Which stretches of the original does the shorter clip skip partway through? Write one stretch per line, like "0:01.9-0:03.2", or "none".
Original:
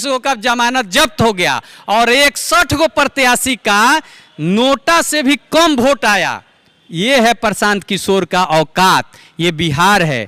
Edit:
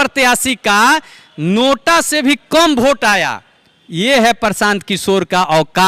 none